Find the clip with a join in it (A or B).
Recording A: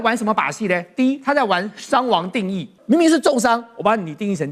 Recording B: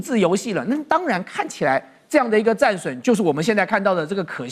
A